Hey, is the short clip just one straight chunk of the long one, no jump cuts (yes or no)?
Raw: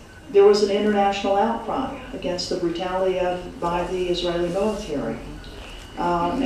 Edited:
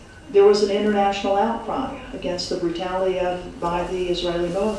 yes